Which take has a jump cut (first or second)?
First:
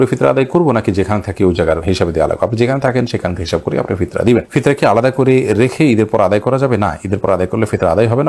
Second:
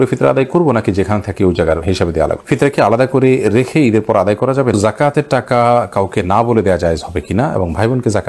second